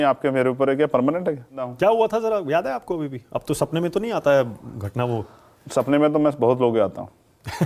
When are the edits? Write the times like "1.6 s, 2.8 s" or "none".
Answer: 1.7 s